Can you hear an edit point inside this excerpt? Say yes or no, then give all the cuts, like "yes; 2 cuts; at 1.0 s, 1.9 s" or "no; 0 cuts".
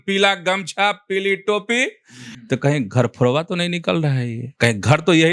yes; 1 cut; at 2.2 s